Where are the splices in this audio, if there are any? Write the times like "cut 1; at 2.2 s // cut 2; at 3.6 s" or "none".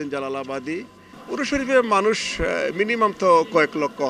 cut 1; at 1.1 s